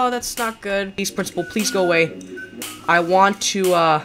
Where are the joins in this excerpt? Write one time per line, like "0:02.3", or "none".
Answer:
0:01.1

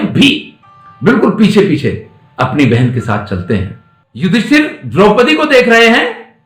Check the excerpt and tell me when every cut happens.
0:04.0

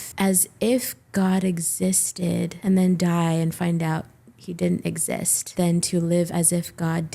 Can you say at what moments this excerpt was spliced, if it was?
0:05.4

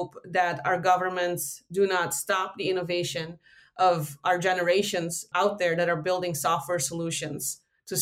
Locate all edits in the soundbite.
0:01.6

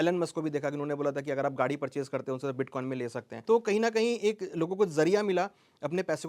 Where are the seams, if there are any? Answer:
0:03.3

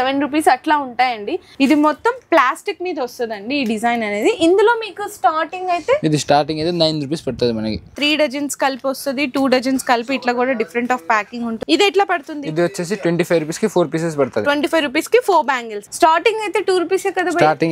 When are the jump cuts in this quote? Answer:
0:01.4
0:08.0
0:11.6
0:15.8

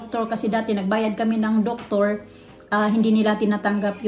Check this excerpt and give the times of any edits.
none

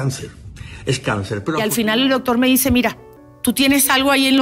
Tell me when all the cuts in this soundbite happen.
0:01.6

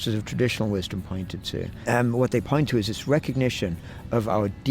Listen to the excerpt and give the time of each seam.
0:01.8

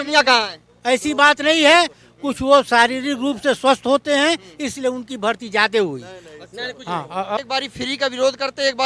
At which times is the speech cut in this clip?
0:07.4

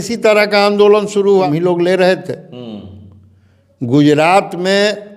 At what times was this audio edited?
0:01.4

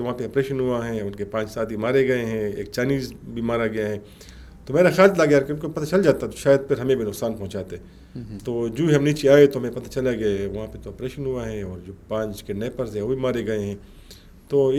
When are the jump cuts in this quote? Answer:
none

